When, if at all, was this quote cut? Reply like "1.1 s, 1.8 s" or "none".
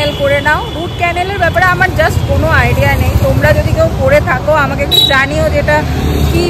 none